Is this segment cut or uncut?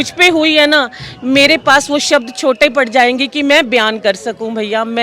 uncut